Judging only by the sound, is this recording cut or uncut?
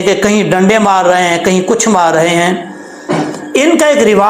uncut